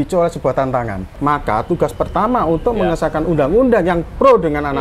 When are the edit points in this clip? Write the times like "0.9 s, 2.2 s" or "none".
1.0 s